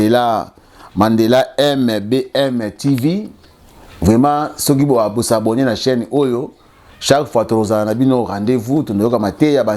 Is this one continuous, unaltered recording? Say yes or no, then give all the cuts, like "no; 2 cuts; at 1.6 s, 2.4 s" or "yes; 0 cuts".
yes; 0 cuts